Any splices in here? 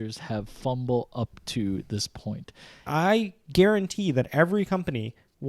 yes; 1 cut; at 2.9 s

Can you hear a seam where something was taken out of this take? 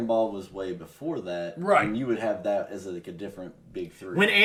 no; 0 cuts

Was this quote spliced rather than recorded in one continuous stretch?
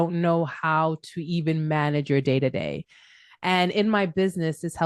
no; 0 cuts

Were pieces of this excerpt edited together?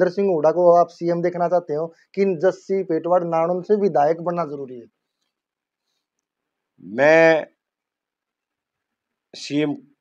no; 0 cuts

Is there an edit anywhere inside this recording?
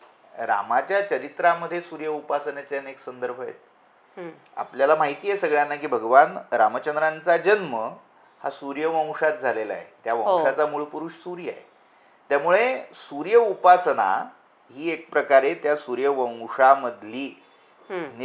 no; 0 cuts

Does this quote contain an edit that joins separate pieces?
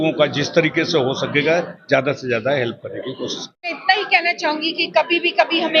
yes; 1 cut; at 3.8 s

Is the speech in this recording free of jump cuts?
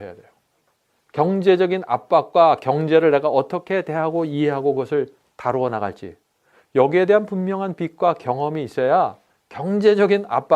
yes; 0 cuts

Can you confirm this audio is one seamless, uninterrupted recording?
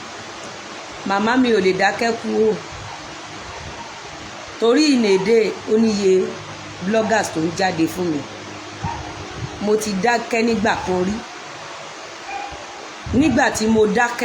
yes; 0 cuts

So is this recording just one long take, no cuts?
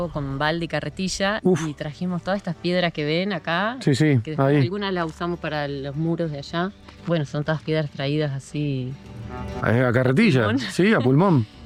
yes; 0 cuts

